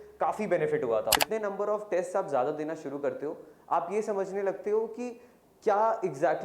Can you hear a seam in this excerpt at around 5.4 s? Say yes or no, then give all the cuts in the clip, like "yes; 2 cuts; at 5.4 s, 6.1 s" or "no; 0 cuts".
no; 1 cut; at 1.2 s